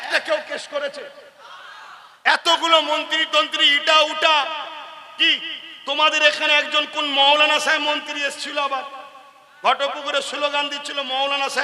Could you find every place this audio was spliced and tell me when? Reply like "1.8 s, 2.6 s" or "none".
none

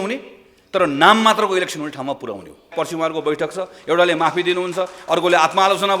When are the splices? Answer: 2.7 s

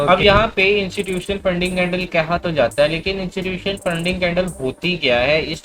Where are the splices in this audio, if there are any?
none

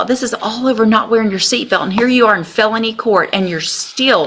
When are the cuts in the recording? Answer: none

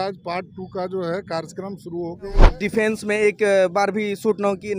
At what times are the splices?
2.5 s

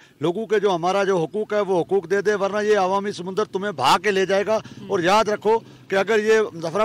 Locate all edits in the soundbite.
none

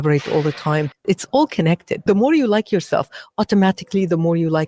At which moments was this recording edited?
1.0 s, 2.1 s

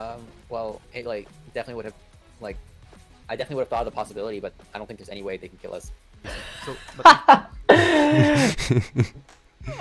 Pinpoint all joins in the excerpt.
0.8 s, 6.2 s

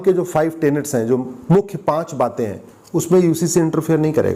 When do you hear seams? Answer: none

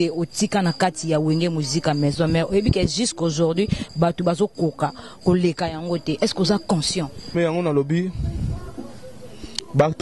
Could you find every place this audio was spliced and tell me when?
7.3 s

